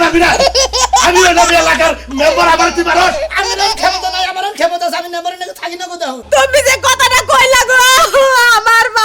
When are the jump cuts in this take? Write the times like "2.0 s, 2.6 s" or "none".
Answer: 6.2 s